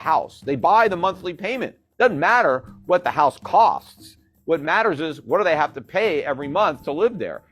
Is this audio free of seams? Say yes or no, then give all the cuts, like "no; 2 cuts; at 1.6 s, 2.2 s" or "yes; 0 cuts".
yes; 0 cuts